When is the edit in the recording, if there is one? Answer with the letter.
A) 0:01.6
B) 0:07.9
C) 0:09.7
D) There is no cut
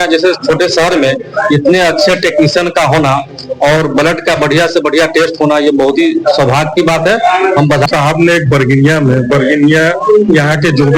B